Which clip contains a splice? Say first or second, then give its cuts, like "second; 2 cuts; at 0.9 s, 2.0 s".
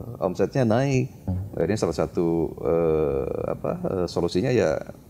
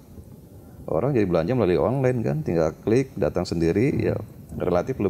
first; 1 cut; at 1.2 s